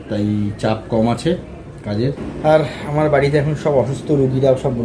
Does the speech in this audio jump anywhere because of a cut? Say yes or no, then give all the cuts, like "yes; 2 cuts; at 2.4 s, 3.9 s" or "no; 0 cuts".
yes; 1 cut; at 2.3 s